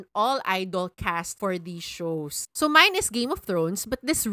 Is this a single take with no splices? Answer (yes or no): no